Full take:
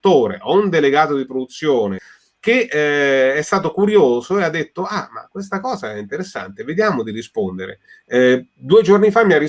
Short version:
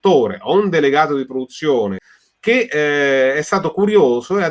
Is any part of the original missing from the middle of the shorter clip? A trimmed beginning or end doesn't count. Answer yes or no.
no